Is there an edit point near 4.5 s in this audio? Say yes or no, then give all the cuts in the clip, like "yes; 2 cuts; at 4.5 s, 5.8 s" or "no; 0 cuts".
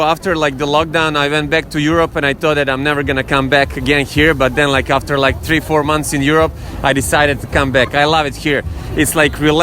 no; 0 cuts